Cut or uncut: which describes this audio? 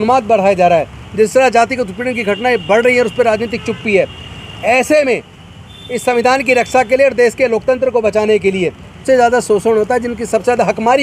cut